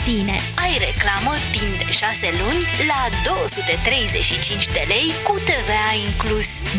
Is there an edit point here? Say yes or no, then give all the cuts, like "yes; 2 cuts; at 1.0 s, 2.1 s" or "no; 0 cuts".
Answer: no; 0 cuts